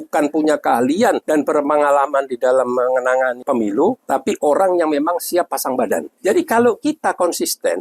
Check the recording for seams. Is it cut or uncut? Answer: cut